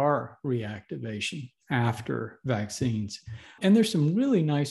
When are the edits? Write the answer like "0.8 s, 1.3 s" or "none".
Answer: 3.6 s